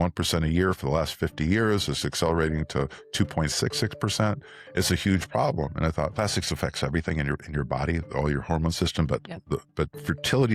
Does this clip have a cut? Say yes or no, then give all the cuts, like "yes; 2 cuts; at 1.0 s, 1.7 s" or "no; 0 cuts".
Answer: no; 0 cuts